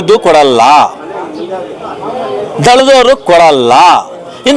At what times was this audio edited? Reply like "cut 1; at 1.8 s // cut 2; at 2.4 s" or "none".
none